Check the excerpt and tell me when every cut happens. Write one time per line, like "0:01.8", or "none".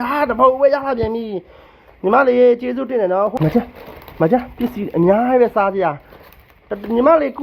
0:03.3